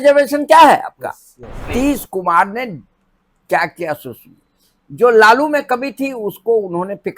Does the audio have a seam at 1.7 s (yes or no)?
yes